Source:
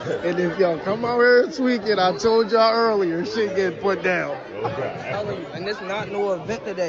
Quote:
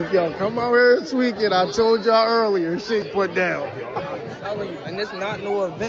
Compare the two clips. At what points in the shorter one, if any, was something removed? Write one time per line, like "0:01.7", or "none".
0:03.1